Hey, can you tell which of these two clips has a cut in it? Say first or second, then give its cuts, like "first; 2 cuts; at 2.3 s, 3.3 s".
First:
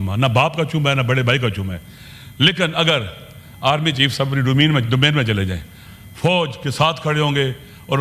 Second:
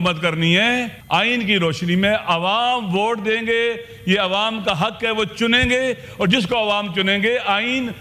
second; 1 cut; at 1.0 s